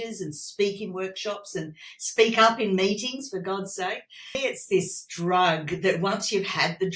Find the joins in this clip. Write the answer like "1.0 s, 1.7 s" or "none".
4.4 s